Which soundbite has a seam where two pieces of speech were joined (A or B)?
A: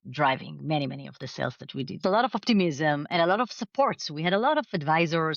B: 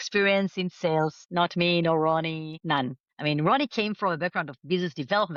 A